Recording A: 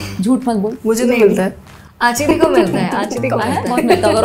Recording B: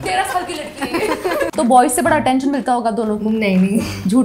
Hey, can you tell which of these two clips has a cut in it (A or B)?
B